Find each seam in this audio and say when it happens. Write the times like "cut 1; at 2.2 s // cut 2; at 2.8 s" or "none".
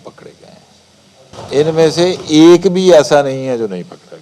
cut 1; at 1.3 s